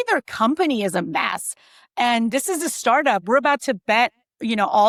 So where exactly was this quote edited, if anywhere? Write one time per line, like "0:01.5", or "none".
none

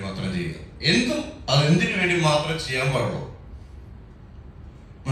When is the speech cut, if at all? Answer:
none

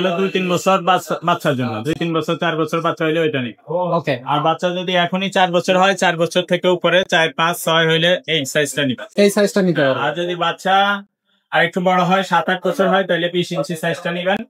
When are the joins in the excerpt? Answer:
none

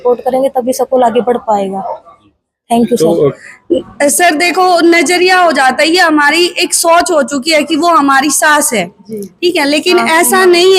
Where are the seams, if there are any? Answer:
0:03.4

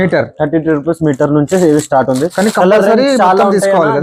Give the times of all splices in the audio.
none

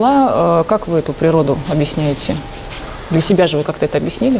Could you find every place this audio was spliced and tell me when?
none

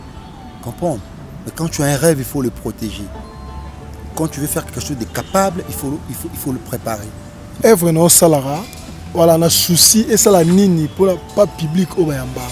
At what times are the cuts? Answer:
0:07.6

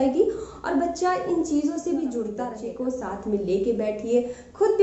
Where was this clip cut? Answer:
0:02.5

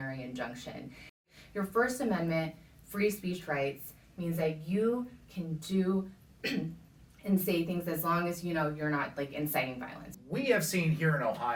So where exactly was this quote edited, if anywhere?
0:01.3
0:10.0

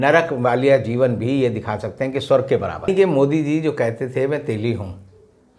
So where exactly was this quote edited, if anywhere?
0:02.9

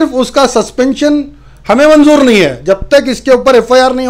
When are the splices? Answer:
none

